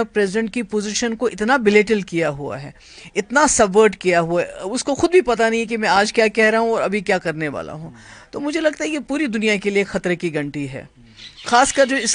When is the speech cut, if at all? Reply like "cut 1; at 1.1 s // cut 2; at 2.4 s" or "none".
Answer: none